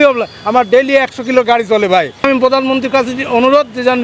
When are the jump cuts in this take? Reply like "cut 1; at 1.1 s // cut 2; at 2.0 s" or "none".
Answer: cut 1; at 2.2 s